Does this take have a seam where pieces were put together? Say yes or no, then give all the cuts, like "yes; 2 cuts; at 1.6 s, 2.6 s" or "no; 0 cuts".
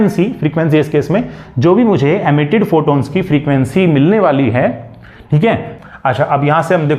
yes; 1 cut; at 5.7 s